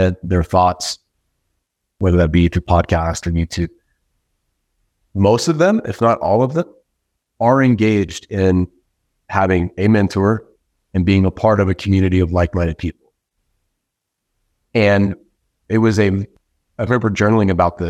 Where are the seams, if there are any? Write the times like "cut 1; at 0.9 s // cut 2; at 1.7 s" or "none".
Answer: cut 1; at 2.0 s

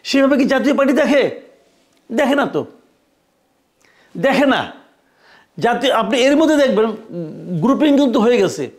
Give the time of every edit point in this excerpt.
none

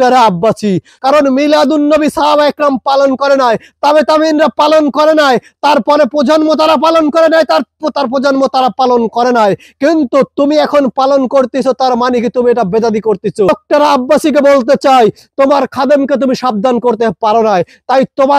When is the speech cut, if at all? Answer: cut 1; at 0.9 s // cut 2; at 13.5 s

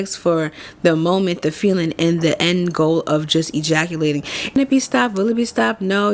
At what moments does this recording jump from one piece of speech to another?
cut 1; at 4.6 s

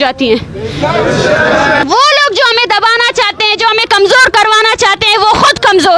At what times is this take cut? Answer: cut 1; at 1.8 s

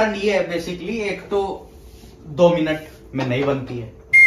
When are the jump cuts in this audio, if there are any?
none

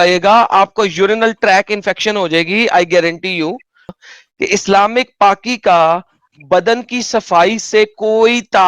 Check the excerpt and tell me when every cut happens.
cut 1; at 4.0 s

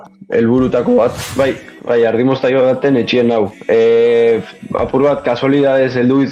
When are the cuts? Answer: cut 1; at 1.2 s

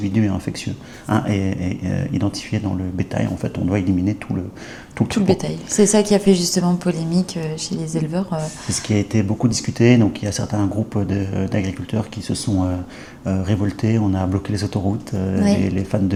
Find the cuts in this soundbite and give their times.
none

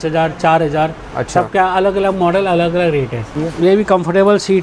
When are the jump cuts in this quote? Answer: cut 1; at 3.2 s

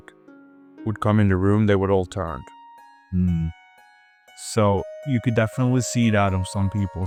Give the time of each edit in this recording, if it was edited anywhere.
none

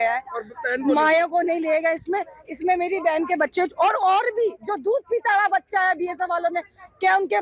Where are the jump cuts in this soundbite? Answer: none

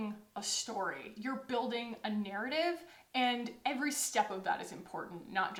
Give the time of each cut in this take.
none

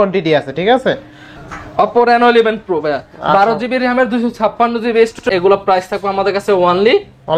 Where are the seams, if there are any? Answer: cut 1; at 1.4 s // cut 2; at 5.2 s

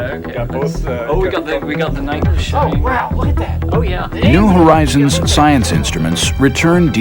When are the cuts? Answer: cut 1; at 1.7 s

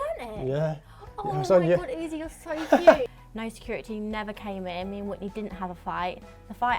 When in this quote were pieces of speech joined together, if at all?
cut 1; at 3.1 s

